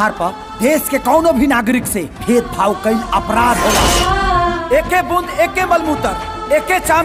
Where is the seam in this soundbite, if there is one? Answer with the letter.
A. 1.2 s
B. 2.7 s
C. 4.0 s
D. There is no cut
C